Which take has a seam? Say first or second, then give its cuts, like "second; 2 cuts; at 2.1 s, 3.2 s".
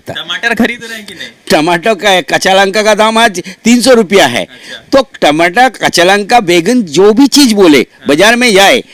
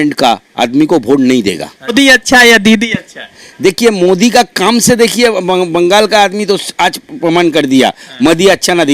second; 1 cut; at 1.8 s